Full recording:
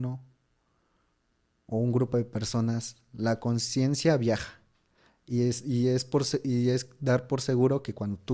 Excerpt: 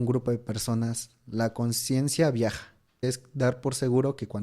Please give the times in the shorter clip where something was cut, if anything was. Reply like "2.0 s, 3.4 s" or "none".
3.0 s